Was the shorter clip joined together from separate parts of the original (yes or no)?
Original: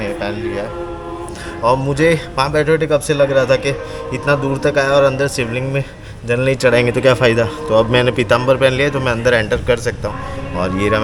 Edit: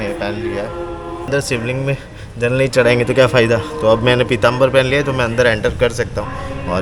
yes